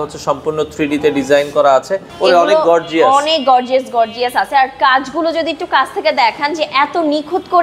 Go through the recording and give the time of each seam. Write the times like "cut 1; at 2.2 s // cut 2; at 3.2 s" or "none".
cut 1; at 2.0 s